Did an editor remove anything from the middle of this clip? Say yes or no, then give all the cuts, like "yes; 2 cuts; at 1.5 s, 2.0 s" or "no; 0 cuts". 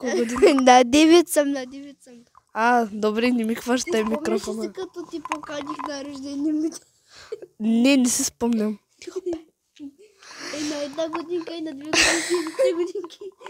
no; 0 cuts